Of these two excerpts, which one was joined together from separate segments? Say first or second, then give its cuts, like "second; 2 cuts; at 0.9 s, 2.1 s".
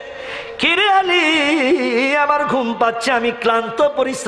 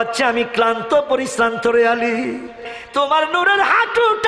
second; 1 cut; at 2.7 s